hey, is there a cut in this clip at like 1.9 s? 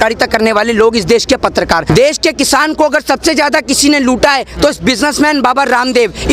yes; 1 cut; at 1.9 s

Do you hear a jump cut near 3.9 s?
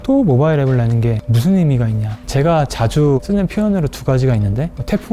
no; 2 cuts; at 1.3 s, 2.1 s

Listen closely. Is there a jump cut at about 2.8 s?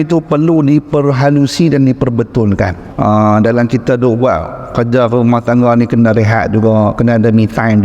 yes; 1 cut; at 2.8 s

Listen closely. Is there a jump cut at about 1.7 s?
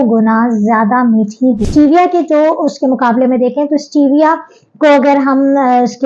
yes; 1 cut; at 1.7 s

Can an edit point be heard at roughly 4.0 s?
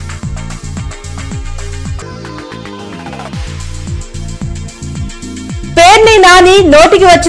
yes; 2 cuts; at 1.9 s, 4.0 s

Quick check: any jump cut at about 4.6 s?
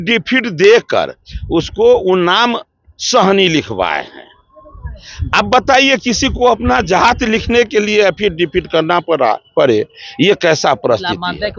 no; 0 cuts

